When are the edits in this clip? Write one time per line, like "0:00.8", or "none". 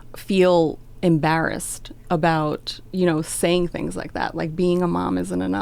none